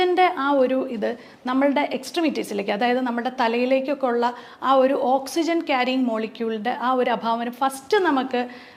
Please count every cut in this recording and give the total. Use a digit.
0